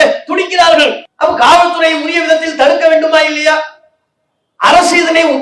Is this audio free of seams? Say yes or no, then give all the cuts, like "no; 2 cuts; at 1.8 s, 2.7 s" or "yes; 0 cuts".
no; 1 cut; at 1.1 s